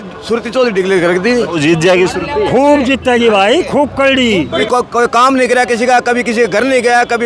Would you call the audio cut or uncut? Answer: cut